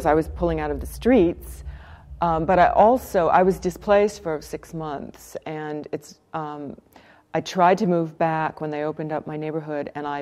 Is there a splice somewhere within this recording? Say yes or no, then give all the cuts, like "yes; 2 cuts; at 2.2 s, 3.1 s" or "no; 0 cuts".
no; 0 cuts